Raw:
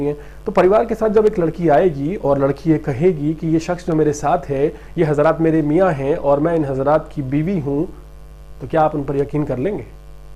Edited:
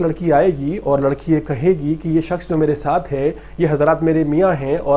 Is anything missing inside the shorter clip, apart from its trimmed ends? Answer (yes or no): no